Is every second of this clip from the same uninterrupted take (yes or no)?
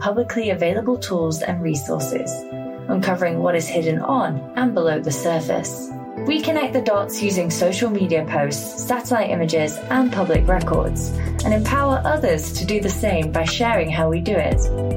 yes